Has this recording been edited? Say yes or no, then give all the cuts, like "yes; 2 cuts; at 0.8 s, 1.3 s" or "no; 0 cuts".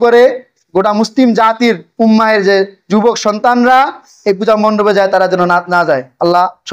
no; 0 cuts